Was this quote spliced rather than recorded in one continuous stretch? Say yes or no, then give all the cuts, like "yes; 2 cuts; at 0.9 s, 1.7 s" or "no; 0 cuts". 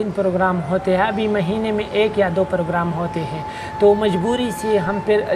no; 0 cuts